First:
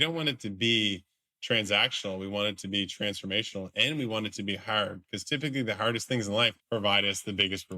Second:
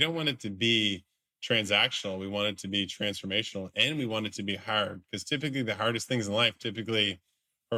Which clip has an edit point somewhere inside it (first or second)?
first